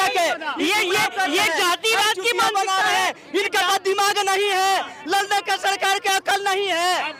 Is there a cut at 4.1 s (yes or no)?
no